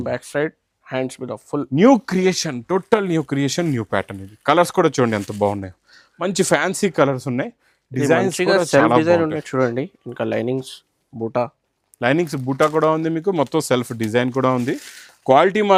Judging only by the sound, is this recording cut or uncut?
uncut